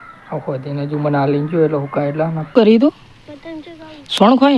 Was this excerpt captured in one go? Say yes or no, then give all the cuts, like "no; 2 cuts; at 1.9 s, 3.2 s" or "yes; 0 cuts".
no; 1 cut; at 2.5 s